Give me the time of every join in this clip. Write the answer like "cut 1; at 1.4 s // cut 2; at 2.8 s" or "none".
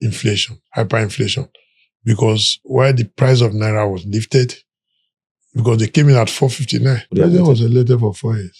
cut 1; at 7.1 s

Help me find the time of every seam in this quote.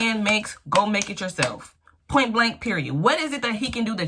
none

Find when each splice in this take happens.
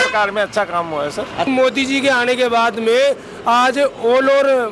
cut 1; at 1.5 s

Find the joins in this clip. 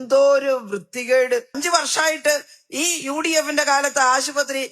cut 1; at 1.6 s

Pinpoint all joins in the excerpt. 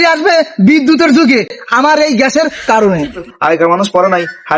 cut 1; at 3.2 s

